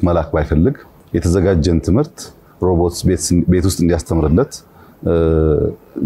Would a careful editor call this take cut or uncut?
cut